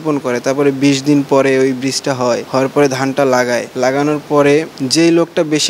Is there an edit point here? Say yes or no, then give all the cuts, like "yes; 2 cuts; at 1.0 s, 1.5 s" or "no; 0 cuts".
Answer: yes; 3 cuts; at 2.4 s, 3.7 s, 4.8 s